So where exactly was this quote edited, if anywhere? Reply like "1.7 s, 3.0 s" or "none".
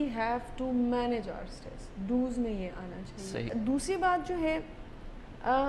3.5 s